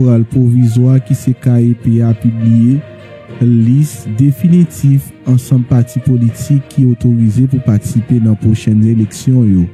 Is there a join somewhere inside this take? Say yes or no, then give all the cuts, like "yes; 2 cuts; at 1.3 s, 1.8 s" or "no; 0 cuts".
no; 0 cuts